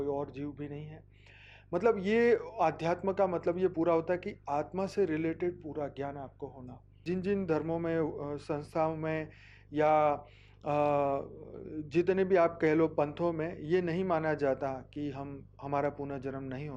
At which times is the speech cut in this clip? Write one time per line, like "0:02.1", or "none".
0:06.9